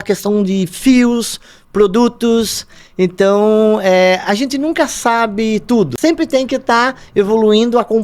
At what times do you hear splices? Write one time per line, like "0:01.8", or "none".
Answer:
0:05.9